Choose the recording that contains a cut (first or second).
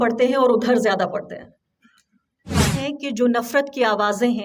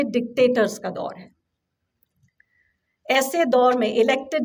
first